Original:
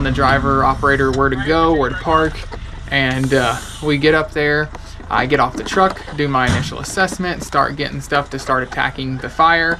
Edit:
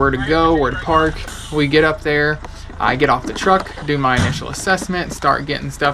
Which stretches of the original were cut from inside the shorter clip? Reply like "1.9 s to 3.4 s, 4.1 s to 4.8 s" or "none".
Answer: 2.6 s to 3.7 s